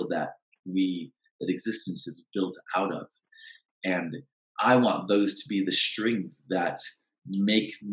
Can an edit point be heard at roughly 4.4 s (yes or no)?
yes